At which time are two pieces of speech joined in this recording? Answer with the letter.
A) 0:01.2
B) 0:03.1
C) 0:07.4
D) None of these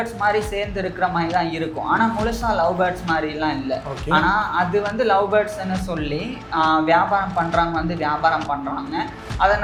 D